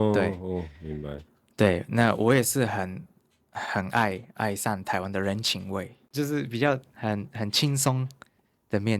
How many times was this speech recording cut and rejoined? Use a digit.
1